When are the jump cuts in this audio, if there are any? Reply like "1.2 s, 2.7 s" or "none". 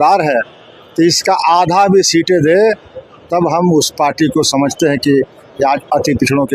none